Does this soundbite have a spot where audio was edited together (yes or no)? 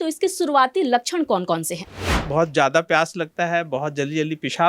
yes